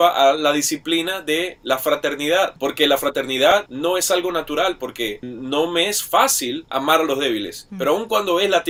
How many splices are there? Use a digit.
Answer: 0